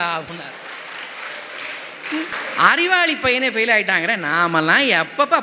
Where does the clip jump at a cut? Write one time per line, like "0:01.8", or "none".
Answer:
0:02.3